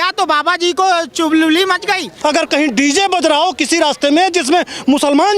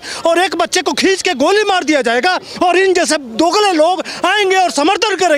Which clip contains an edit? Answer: first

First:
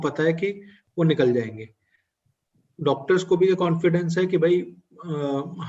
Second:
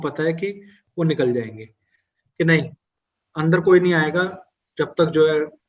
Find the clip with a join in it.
second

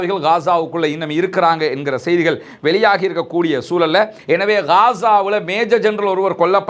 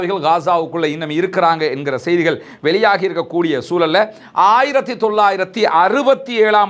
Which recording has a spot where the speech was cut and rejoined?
first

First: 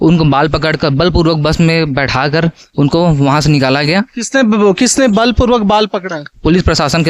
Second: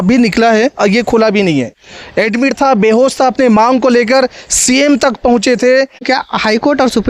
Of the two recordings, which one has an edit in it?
second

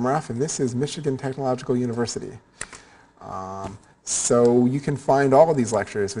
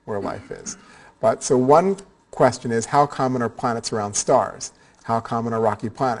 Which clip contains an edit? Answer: first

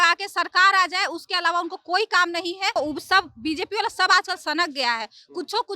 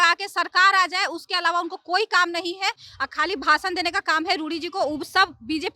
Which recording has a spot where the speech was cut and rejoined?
first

